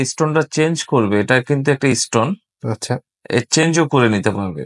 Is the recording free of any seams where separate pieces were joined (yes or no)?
yes